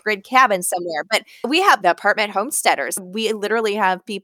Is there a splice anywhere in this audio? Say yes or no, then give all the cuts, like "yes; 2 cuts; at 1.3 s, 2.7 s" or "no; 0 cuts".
yes; 2 cuts; at 1.4 s, 3.0 s